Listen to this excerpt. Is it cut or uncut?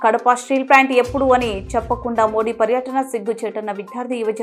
uncut